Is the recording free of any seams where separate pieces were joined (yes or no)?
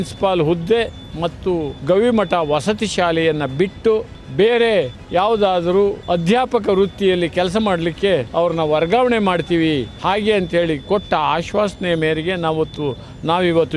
no